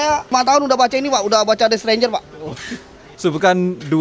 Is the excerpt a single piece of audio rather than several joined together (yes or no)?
no